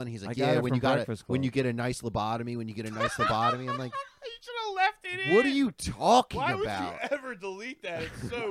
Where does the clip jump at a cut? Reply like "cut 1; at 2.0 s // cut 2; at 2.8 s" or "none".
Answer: none